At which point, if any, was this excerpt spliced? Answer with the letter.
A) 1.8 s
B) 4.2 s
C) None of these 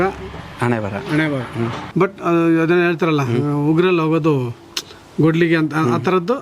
A